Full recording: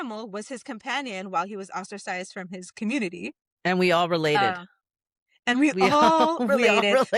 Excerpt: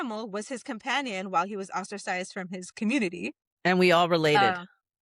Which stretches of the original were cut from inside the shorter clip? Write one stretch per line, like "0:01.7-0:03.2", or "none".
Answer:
none